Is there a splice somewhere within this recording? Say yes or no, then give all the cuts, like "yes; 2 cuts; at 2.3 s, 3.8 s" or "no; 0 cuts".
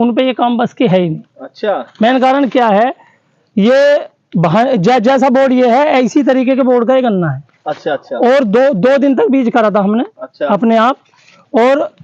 no; 0 cuts